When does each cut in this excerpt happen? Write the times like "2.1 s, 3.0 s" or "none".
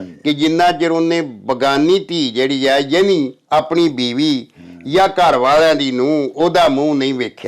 none